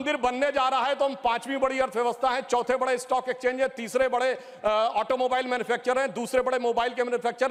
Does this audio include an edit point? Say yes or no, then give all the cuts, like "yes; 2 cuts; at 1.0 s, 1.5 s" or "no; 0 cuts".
no; 0 cuts